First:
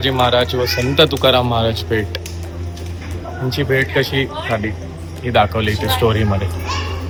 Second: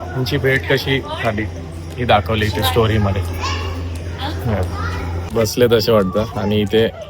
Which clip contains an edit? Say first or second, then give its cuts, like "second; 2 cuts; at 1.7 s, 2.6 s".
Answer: second; 1 cut; at 5.3 s